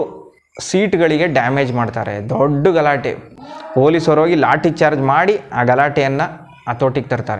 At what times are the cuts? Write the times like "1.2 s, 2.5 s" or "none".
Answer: none